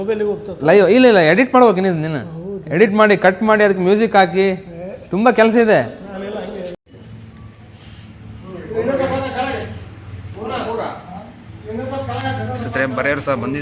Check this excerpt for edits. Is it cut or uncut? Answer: cut